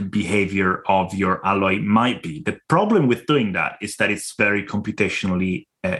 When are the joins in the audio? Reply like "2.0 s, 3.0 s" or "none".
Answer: none

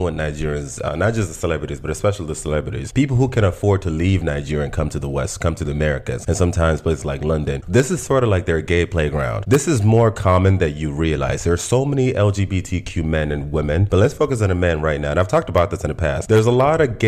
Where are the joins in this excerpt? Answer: 2.8 s, 6.1 s

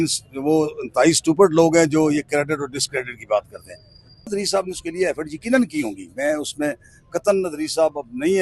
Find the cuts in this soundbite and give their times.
4.3 s

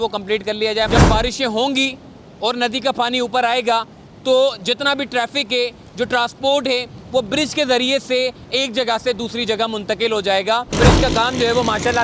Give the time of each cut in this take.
0.9 s, 10.8 s

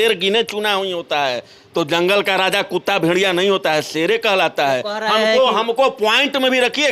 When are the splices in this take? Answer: none

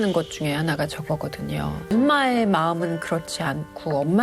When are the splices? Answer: 1.9 s

